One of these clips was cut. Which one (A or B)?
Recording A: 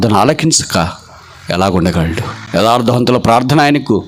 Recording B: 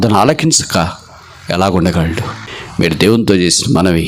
B